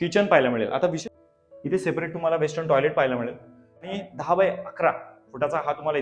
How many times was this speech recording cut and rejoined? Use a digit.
2